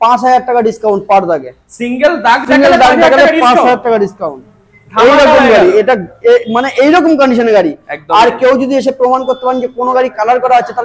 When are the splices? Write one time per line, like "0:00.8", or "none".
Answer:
none

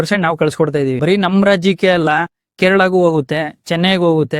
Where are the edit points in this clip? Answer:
0:01.0

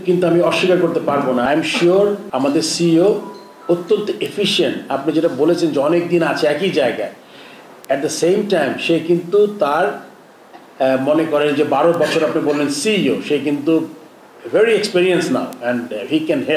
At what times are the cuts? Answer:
0:01.4
0:02.2

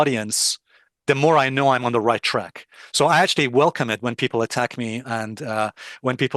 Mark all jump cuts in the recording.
none

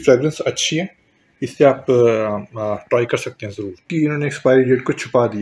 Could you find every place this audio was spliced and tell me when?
0:03.8

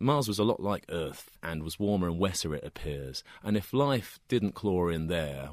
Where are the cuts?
0:01.4

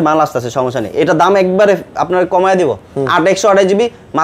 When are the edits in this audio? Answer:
none

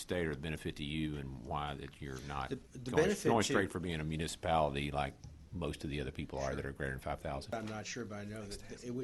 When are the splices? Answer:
0:07.5

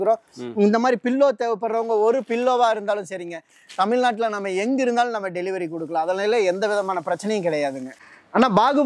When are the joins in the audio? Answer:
0:07.8

